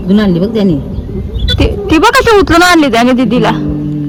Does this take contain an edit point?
no; 0 cuts

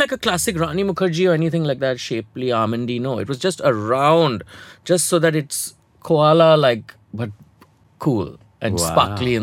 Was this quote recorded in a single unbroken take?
yes; 0 cuts

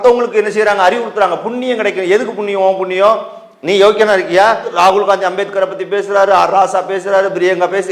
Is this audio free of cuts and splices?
yes; 0 cuts

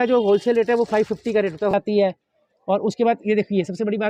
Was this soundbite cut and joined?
yes; 1 cut; at 1.7 s

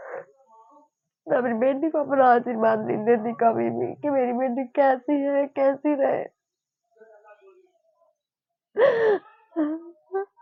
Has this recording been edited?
no; 0 cuts

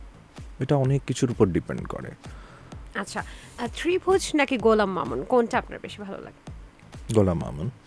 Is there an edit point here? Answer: no; 0 cuts

